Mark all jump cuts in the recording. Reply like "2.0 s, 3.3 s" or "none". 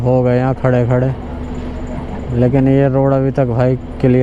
none